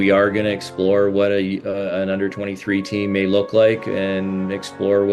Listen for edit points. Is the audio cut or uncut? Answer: uncut